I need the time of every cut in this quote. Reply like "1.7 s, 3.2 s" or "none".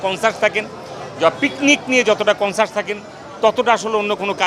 none

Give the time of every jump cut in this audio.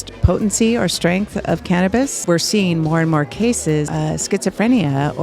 2.2 s, 3.9 s

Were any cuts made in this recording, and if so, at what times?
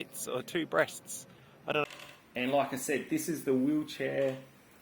1.8 s

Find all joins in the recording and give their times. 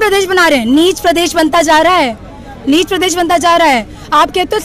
none

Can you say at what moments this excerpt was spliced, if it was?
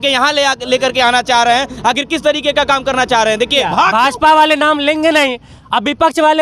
3.7 s

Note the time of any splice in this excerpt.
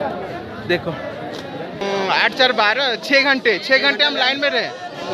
1.8 s

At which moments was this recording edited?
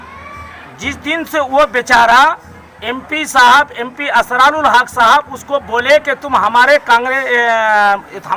none

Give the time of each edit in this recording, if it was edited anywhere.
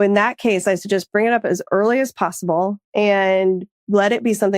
2.9 s

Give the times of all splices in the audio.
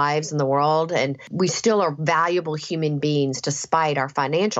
1.2 s

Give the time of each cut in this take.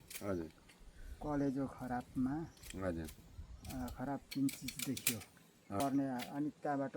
5.8 s

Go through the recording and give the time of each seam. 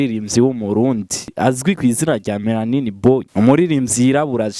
1.4 s, 3.3 s

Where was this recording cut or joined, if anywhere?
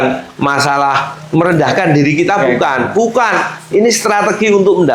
none

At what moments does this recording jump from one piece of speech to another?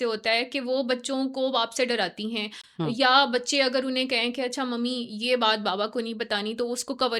none

